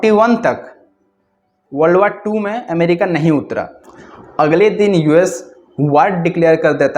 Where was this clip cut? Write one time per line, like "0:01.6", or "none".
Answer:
0:03.7